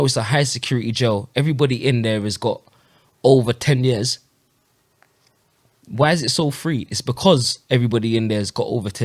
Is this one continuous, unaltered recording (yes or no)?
yes